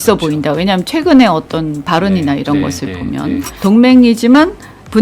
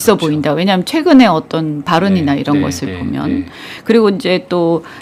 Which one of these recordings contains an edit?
first; 1 cut; at 3.5 s

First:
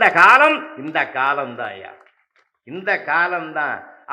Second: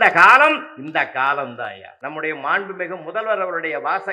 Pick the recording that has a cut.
second; 1 cut; at 1.9 s

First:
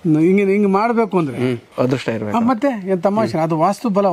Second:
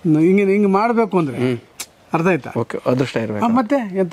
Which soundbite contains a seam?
first; 1 cut; at 1.7 s

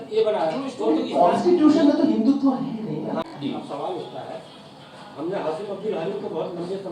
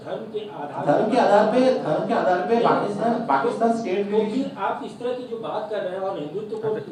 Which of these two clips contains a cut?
first; 1 cut; at 3.3 s

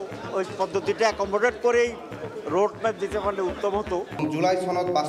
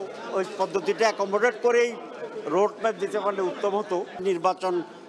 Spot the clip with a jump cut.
first; 1 cut; at 4.2 s

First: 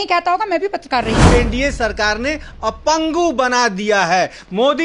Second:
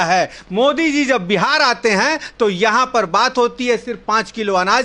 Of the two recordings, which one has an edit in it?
first; 1 cut; at 1.2 s

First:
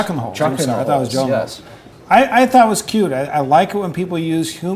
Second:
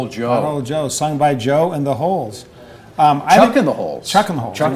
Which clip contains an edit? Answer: first; 1 cut; at 1.8 s

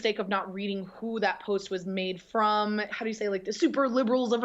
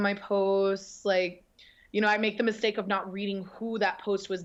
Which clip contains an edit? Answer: first; 1 cut; at 2.9 s

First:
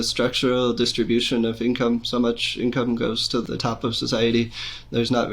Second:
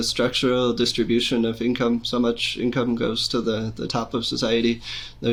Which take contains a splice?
first; 1 cut; at 3.4 s

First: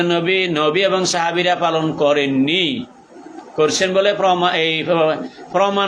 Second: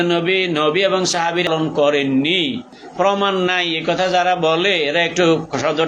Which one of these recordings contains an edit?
second; 2 cuts; at 1.5 s, 2.8 s

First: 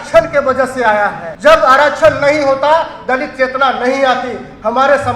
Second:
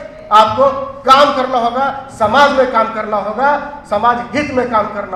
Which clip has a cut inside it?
first; 1 cut; at 1.3 s

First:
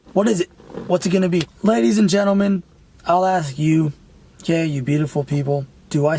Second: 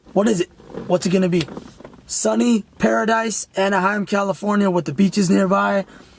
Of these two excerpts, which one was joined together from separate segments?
first; 1 cut; at 1.5 s

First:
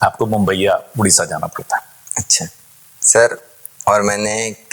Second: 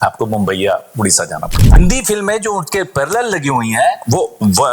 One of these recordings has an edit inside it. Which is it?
second; 1 cut; at 1.8 s

